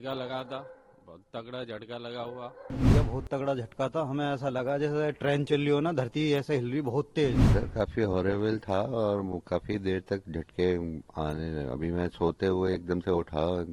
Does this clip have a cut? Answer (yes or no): yes